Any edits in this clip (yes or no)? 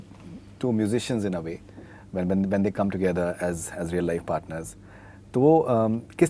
no